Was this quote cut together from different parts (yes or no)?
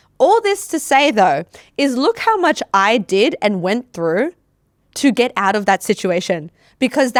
no